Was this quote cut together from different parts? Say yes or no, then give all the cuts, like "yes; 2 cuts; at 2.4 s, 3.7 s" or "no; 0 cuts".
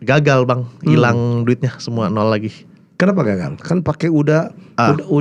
no; 0 cuts